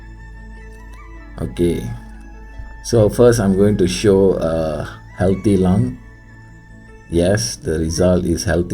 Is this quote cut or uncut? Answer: cut